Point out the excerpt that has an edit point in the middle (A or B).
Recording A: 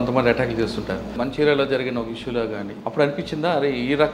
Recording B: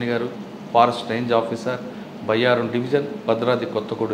A